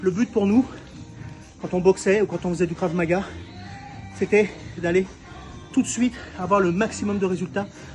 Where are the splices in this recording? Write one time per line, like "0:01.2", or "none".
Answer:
none